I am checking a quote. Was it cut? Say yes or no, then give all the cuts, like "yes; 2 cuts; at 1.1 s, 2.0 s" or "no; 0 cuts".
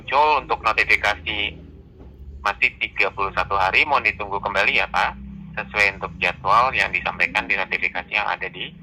no; 0 cuts